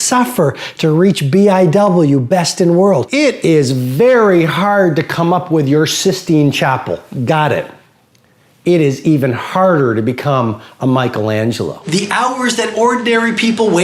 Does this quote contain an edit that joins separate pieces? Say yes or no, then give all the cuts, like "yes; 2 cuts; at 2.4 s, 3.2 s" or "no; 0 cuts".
yes; 2 cuts; at 3.1 s, 11.8 s